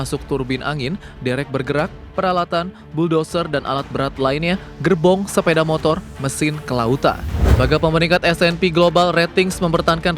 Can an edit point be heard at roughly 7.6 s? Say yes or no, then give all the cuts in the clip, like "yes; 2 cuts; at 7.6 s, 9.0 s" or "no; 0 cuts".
yes; 1 cut; at 7.6 s